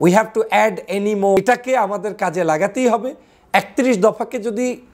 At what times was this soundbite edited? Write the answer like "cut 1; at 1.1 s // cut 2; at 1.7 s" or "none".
cut 1; at 1.4 s